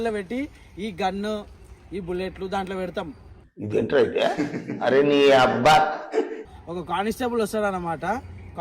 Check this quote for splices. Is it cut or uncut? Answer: cut